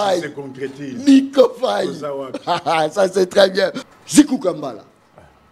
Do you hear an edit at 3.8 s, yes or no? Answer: yes